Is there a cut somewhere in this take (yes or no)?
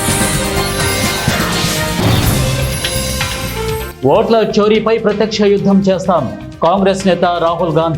yes